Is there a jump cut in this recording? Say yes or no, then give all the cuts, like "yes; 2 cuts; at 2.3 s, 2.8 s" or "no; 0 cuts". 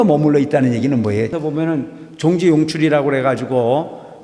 yes; 1 cut; at 1.4 s